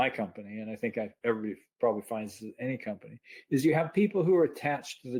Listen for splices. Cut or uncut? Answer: uncut